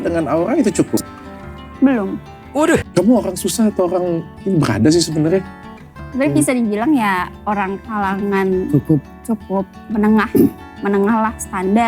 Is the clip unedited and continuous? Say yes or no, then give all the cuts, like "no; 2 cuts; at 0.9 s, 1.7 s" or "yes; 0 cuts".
no; 2 cuts; at 2.6 s, 6.0 s